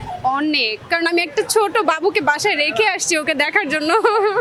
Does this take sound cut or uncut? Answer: uncut